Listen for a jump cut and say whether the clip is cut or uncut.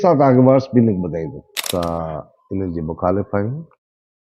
cut